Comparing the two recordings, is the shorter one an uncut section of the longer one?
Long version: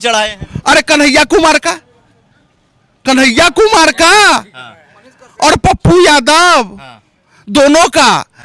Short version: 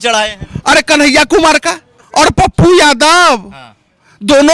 no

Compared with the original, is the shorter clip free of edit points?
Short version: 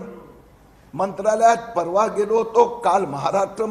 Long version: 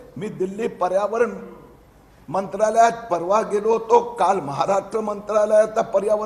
yes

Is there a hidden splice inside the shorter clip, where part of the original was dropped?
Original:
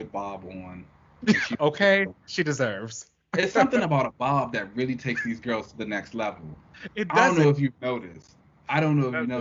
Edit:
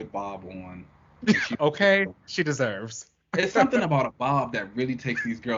no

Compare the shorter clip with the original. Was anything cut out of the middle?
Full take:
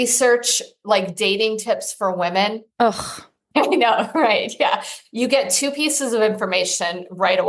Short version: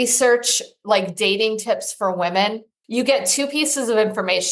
yes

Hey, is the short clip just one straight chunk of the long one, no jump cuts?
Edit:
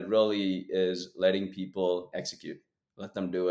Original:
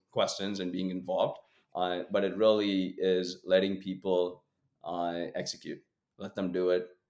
no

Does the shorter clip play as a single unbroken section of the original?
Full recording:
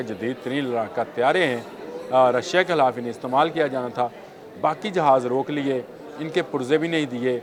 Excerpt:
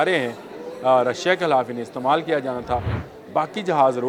yes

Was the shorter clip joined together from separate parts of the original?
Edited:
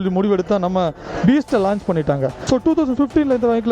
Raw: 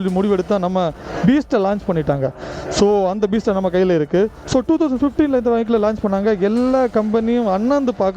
yes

